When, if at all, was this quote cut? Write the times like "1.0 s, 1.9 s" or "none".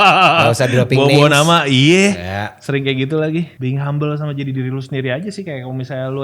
3.5 s